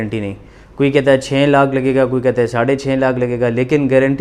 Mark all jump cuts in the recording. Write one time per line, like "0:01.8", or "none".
none